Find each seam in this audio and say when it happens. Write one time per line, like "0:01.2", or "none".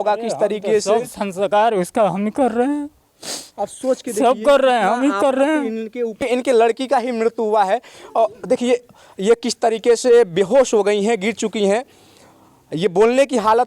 0:06.2